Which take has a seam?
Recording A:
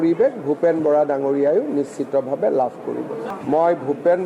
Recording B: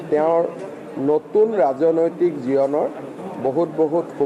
A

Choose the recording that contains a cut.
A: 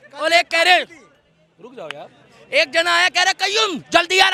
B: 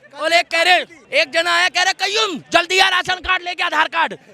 B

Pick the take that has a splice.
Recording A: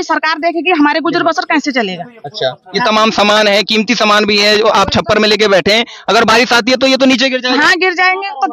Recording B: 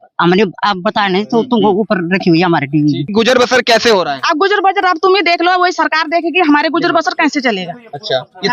B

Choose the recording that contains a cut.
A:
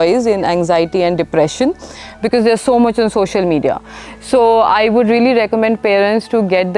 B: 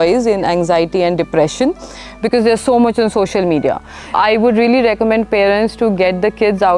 B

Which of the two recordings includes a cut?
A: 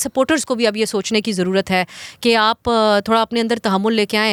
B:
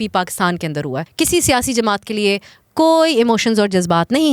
B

